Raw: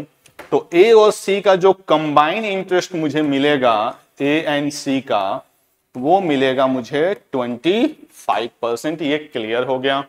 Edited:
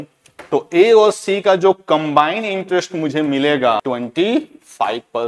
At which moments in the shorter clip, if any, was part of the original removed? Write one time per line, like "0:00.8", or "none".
0:03.8